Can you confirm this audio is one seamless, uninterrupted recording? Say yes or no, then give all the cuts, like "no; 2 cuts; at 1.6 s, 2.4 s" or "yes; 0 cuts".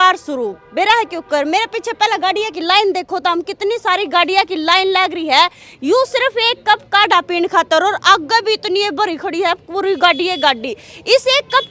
yes; 0 cuts